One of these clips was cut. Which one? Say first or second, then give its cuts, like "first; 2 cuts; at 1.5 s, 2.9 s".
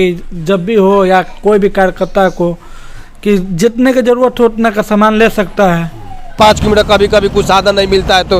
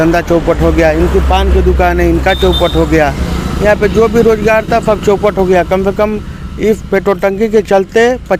first; 1 cut; at 6.4 s